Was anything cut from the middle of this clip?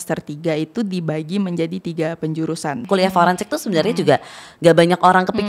yes; 1 cut; at 2.8 s

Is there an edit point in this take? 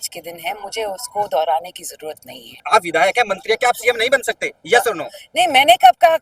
yes; 1 cut; at 2.5 s

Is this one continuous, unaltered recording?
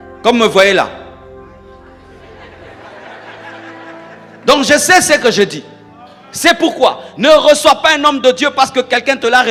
yes; 0 cuts

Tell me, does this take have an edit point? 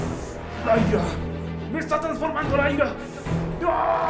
no; 0 cuts

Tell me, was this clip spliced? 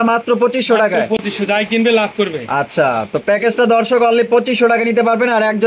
no; 0 cuts

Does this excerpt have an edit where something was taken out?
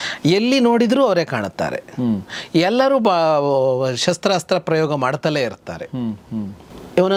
no; 0 cuts

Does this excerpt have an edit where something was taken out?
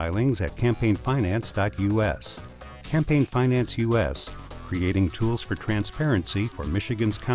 no; 0 cuts

